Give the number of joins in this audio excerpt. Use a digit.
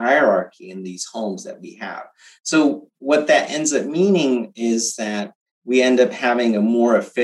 0